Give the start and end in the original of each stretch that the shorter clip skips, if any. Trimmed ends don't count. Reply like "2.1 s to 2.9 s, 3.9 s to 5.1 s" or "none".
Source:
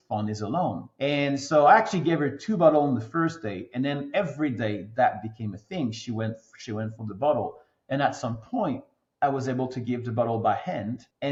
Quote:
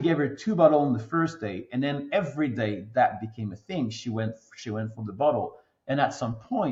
none